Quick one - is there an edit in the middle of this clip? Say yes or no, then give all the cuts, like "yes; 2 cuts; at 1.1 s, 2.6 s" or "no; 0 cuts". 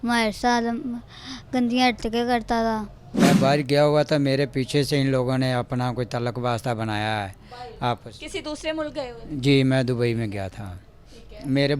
yes; 1 cut; at 3.2 s